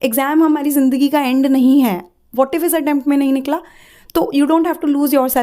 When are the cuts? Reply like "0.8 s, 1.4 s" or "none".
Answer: none